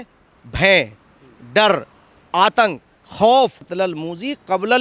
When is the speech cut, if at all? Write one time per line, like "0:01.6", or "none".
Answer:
0:03.7